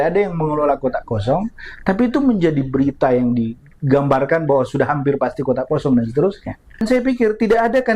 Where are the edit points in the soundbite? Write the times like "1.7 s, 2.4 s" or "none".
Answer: 6.8 s